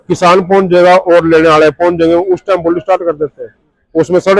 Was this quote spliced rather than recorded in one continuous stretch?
no; 0 cuts

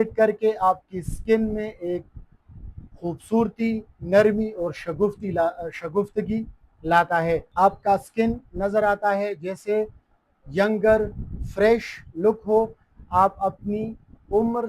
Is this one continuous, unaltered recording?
no; 1 cut; at 7.5 s

